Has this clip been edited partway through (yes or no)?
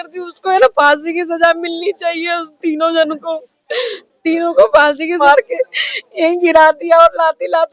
yes